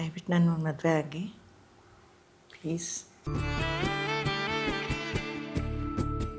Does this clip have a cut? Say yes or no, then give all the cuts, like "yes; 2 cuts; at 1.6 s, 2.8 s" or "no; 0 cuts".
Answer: no; 0 cuts